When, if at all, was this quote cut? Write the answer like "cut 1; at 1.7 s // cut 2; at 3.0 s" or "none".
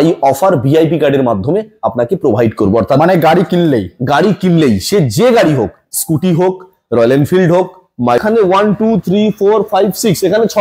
cut 1; at 8.2 s